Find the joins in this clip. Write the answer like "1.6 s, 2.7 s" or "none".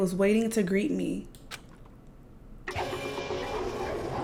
none